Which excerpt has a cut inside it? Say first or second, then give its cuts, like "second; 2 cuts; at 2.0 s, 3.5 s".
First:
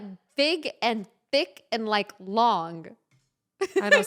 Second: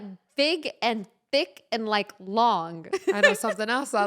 second; 1 cut; at 2.8 s